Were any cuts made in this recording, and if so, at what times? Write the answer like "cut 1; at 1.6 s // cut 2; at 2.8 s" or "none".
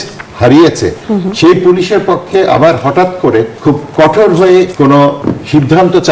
cut 1; at 3.5 s // cut 2; at 4.9 s